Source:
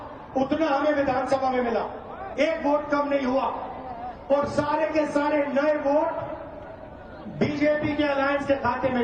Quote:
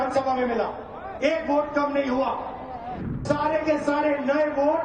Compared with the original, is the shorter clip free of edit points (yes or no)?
no